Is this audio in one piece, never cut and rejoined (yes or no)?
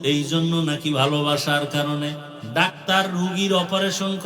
no